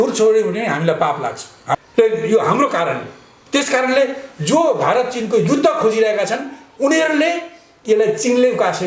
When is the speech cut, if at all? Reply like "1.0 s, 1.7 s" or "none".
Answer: 1.8 s